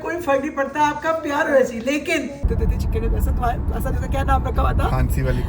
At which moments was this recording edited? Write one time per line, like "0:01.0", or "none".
0:02.4